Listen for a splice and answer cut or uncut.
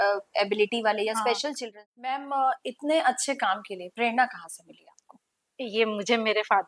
cut